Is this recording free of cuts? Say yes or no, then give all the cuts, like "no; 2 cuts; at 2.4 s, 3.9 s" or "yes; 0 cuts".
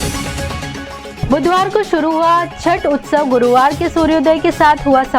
no; 1 cut; at 1.1 s